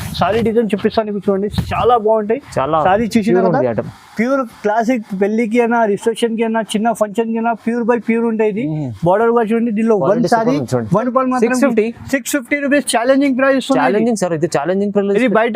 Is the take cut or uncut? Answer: cut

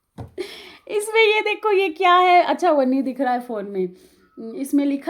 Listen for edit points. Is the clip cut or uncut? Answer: uncut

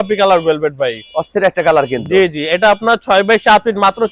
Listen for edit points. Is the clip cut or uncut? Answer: uncut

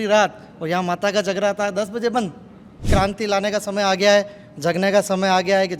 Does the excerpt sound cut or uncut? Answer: cut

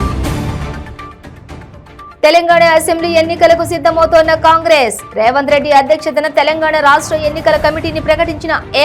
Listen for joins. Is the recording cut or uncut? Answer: cut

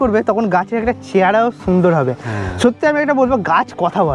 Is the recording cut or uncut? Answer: uncut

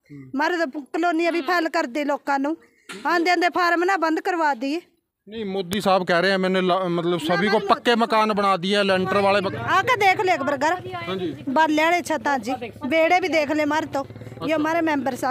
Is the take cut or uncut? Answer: uncut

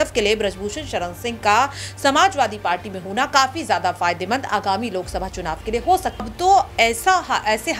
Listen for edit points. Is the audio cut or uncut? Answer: cut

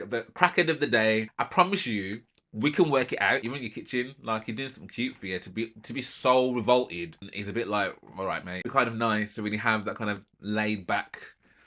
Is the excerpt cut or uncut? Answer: cut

